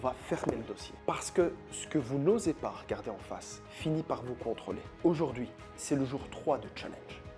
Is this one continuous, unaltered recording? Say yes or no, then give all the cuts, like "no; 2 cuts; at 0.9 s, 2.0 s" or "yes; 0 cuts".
yes; 0 cuts